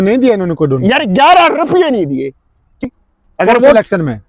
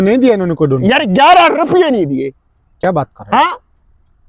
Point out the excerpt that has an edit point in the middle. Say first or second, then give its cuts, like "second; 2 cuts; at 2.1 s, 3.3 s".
first; 1 cut; at 2.8 s